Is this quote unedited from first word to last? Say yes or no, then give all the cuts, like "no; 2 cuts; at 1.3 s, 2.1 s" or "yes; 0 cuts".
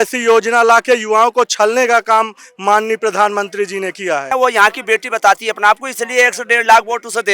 no; 1 cut; at 4.3 s